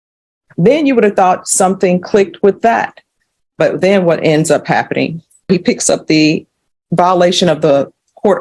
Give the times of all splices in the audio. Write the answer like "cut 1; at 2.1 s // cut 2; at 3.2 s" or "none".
cut 1; at 5.5 s

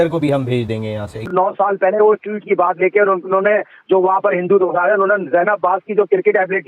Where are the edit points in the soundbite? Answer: cut 1; at 1.1 s

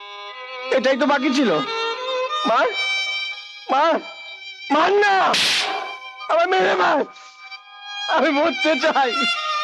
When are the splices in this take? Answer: none

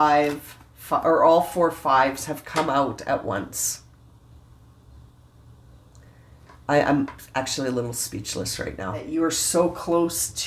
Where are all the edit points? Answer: cut 1; at 9.1 s

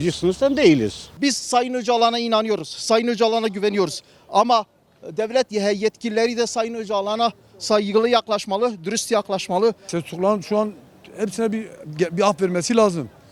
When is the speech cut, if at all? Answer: cut 1; at 1.1 s // cut 2; at 9.9 s

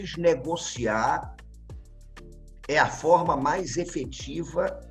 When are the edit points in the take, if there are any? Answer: none

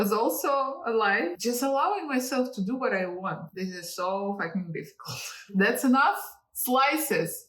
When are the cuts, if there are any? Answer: cut 1; at 1.4 s // cut 2; at 5.5 s

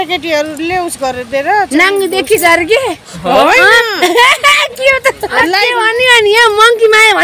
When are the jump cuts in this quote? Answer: cut 1; at 5.7 s

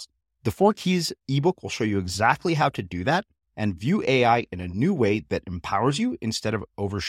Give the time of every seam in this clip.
none

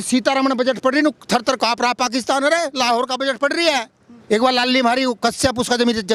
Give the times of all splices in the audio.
none

